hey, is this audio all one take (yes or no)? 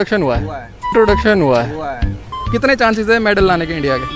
no